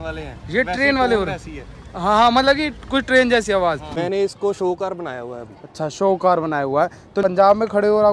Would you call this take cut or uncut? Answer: cut